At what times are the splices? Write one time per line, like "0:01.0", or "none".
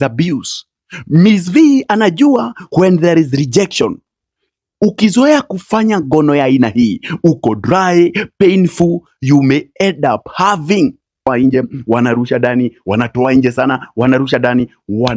0:11.3